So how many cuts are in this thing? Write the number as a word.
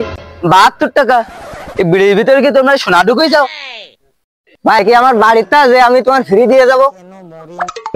one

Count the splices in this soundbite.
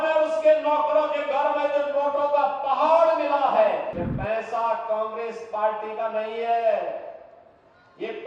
one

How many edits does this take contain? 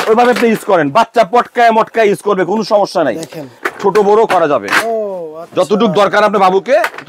one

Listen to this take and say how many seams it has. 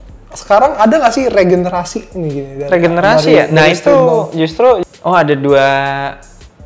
one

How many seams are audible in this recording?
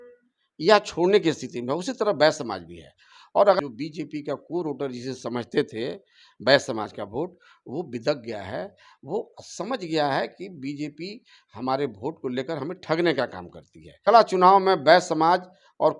two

